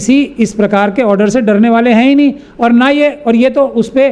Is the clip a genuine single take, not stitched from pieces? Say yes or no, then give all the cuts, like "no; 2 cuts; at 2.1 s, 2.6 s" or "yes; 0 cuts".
yes; 0 cuts